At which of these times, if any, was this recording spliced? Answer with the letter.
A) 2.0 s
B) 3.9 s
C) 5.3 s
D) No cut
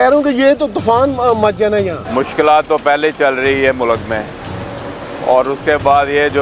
A